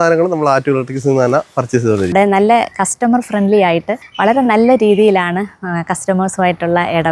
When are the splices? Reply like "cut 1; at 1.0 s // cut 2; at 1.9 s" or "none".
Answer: cut 1; at 2.1 s // cut 2; at 4.0 s

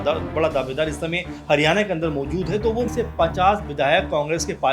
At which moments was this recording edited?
cut 1; at 2.9 s

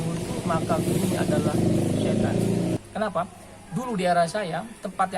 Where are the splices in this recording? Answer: cut 1; at 2.8 s

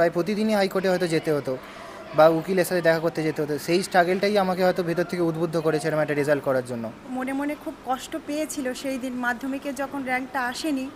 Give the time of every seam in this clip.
cut 1; at 7.1 s

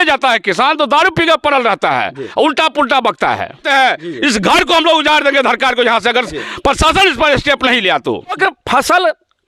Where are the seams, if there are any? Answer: cut 1; at 3.6 s // cut 2; at 8.4 s

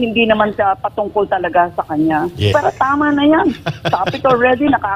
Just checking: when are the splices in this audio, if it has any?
cut 1; at 2.5 s

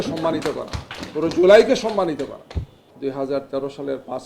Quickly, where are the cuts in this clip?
cut 1; at 2.9 s

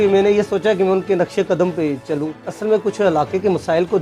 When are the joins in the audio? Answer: cut 1; at 2.4 s

